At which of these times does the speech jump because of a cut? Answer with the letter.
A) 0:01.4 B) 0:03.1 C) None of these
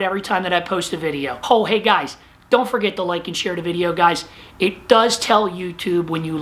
A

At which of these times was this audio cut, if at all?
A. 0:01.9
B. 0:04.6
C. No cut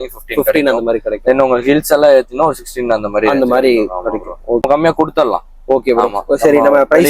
B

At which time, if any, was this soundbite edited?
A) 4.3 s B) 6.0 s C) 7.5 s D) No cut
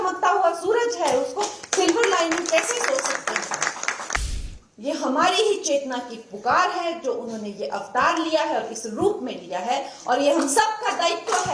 A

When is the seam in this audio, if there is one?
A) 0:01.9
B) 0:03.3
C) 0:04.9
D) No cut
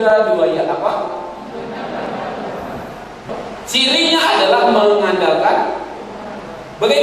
B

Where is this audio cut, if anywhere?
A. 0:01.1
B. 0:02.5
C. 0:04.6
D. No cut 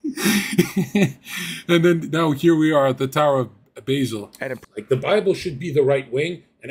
C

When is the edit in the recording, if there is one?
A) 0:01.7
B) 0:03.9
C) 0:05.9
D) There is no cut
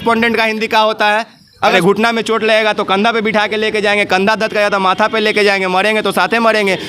A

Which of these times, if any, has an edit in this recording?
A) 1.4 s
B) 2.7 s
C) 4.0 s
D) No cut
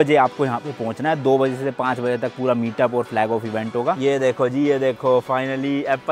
C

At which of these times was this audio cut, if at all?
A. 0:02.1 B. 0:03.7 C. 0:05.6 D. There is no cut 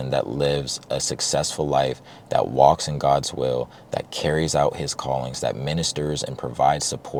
D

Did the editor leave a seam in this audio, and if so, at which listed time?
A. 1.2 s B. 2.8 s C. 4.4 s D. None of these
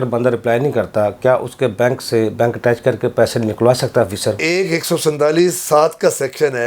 C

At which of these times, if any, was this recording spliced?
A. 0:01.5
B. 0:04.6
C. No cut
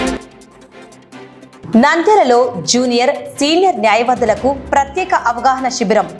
A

